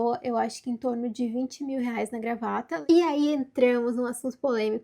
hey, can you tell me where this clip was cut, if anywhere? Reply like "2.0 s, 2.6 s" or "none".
2.7 s